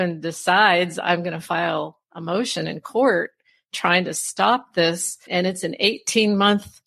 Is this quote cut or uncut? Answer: cut